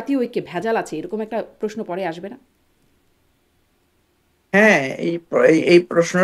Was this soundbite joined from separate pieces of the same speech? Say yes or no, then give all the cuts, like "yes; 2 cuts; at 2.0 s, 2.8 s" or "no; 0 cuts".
no; 0 cuts